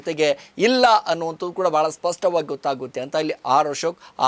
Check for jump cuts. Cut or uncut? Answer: uncut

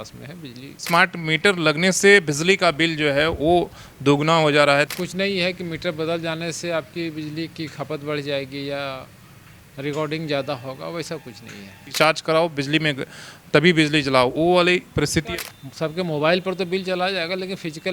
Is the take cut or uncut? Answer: cut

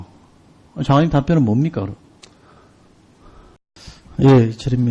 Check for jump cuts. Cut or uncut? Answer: cut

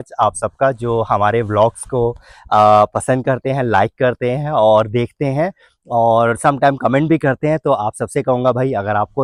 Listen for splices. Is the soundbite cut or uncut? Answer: uncut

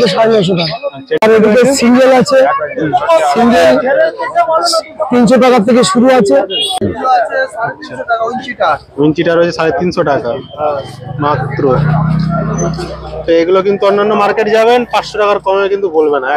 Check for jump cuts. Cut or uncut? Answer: cut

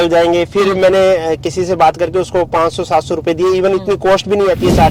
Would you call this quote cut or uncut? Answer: uncut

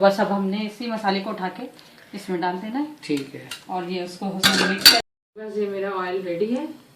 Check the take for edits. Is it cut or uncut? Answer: cut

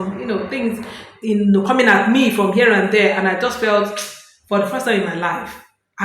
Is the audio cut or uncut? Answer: uncut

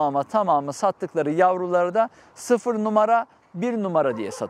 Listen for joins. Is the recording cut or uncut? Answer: uncut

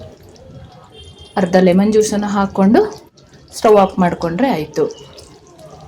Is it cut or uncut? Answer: uncut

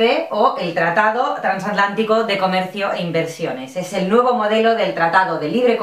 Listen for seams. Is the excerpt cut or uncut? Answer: cut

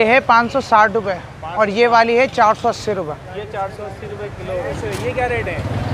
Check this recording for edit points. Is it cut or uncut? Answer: cut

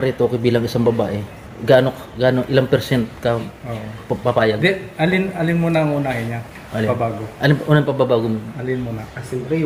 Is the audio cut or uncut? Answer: uncut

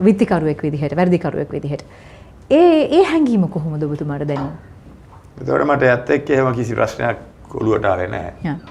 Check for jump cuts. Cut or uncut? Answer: uncut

